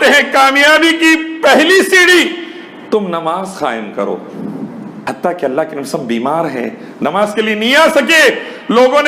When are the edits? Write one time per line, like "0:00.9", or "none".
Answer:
0:04.9